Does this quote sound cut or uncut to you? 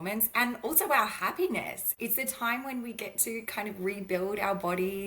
cut